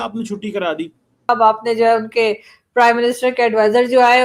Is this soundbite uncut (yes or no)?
no